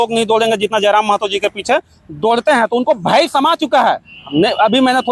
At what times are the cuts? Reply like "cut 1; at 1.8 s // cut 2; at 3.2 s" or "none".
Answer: none